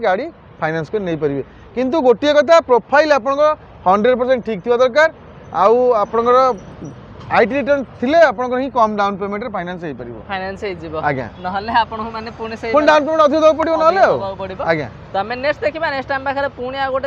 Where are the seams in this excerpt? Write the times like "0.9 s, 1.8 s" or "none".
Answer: none